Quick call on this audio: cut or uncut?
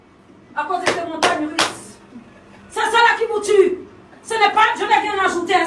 uncut